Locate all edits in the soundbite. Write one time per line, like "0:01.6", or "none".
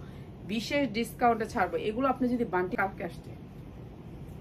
0:02.7